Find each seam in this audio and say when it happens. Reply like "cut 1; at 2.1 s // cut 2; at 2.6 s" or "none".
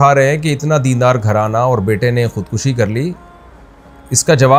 none